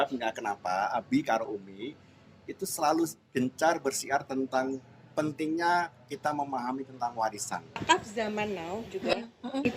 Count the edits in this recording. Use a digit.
1